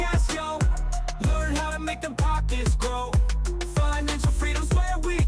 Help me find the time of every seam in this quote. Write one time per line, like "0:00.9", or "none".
none